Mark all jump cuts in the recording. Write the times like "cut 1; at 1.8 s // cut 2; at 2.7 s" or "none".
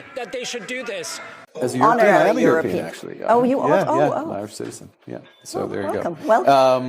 cut 1; at 1.5 s